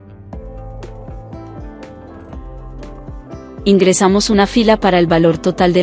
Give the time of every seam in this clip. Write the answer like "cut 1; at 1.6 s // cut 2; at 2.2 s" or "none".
cut 1; at 3.6 s